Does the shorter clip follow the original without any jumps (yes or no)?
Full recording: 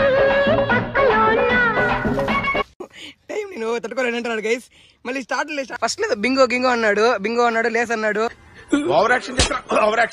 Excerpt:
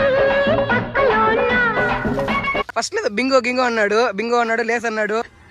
no